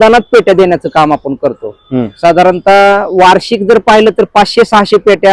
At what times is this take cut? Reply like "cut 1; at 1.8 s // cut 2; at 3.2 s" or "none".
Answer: none